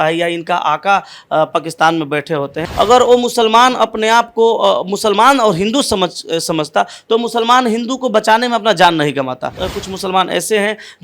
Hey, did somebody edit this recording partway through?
yes; 2 cuts; at 2.6 s, 9.7 s

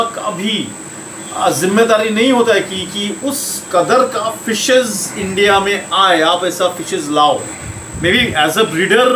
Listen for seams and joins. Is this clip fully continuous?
yes; 0 cuts

